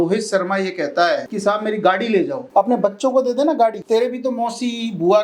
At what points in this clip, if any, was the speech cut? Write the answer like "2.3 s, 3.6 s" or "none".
1.3 s, 2.4 s, 3.8 s

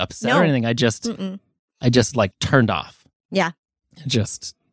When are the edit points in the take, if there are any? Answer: 2.4 s

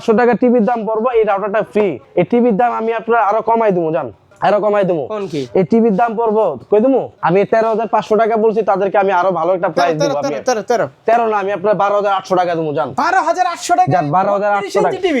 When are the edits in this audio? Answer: 2.0 s, 4.2 s, 7.1 s

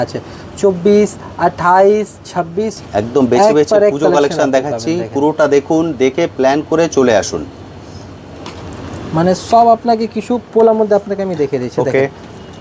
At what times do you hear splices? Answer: 2.8 s

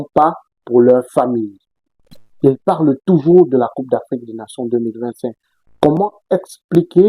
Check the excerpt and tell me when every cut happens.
none

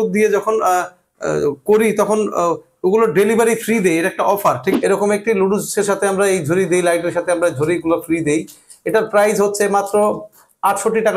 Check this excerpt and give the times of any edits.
4.7 s

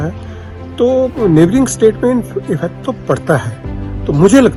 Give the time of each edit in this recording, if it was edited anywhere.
none

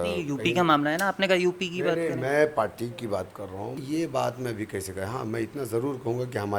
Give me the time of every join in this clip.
3.8 s

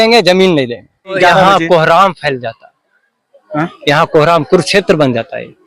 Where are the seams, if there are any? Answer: 1.2 s

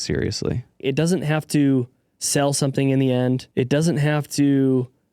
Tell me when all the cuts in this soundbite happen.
0.8 s, 3.4 s

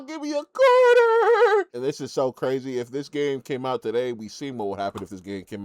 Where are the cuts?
1.8 s

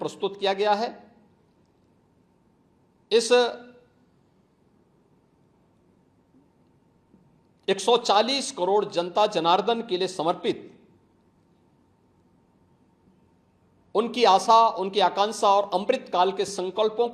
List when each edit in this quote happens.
none

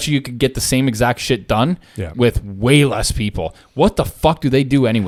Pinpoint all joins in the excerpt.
none

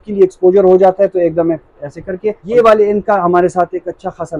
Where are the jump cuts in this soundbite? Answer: 2.4 s

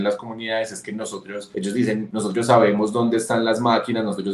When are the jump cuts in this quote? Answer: 1.4 s, 2.1 s

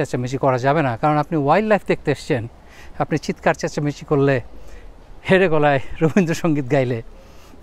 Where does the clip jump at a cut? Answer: none

